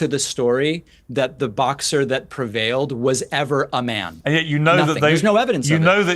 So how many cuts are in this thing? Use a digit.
1